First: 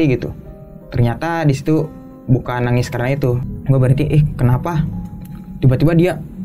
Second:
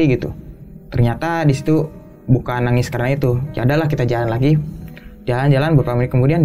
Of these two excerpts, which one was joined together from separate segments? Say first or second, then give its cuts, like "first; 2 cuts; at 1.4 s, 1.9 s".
first; 1 cut; at 3.5 s